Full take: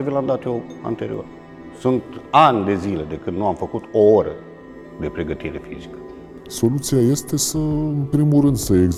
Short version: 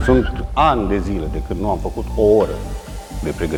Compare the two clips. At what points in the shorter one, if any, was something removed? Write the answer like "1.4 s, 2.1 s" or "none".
none